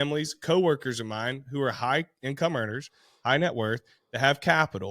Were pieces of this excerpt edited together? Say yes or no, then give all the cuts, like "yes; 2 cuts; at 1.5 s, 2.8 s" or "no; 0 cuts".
no; 0 cuts